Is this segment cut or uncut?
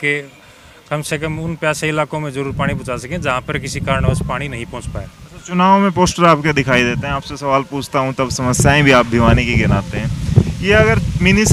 uncut